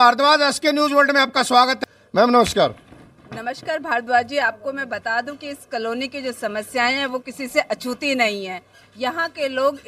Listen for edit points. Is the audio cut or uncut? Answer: cut